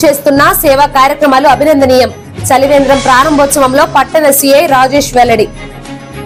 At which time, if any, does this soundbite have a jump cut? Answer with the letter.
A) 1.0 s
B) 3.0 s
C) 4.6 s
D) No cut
D